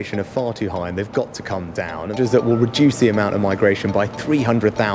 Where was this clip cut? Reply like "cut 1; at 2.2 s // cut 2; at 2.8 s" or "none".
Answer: cut 1; at 2.2 s